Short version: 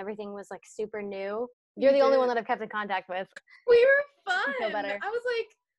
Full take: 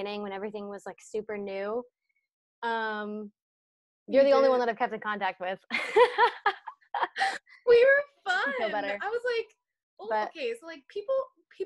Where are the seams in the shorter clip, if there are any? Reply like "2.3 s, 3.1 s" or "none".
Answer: 1.6 s, 3.5 s